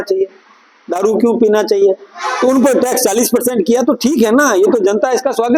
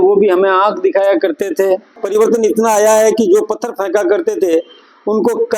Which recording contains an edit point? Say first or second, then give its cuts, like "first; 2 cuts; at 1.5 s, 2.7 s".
second; 1 cut; at 2.0 s